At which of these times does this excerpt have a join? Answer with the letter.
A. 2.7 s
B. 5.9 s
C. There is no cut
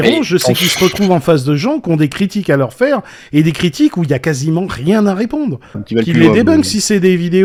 C